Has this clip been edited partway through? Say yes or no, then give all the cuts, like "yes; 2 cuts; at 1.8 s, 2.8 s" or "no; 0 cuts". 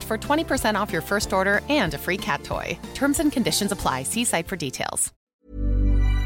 yes; 1 cut; at 5.3 s